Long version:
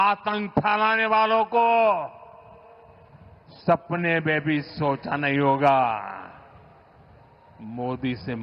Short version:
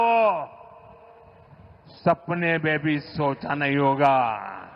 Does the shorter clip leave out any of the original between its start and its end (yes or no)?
no